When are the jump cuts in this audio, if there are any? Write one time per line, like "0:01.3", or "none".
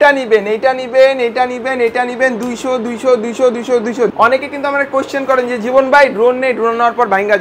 0:04.1